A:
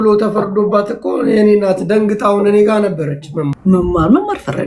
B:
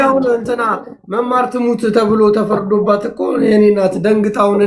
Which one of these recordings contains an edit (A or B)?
A